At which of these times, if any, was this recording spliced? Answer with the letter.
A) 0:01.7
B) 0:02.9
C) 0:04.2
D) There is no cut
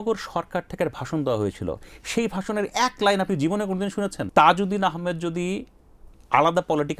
C